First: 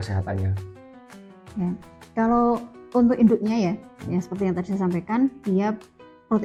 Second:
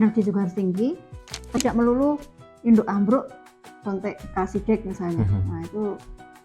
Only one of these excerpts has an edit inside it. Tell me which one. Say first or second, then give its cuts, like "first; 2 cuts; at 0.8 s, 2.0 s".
second; 1 cut; at 1.6 s